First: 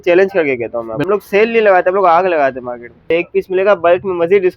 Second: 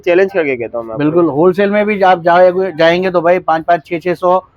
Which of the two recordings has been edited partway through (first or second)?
first